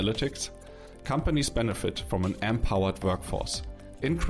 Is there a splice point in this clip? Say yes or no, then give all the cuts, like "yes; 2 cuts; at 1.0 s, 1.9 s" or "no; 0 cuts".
no; 0 cuts